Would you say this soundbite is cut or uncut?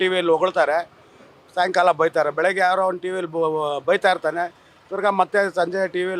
uncut